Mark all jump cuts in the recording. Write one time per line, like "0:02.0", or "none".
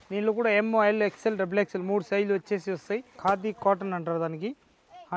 0:03.1

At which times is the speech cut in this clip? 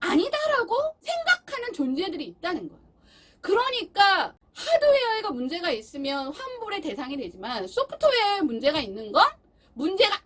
0:01.0
0:04.4

